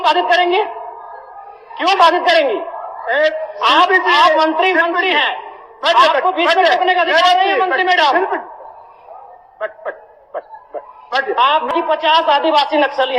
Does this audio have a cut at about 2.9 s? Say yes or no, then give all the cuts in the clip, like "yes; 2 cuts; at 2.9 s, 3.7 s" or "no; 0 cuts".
no; 1 cut; at 11.7 s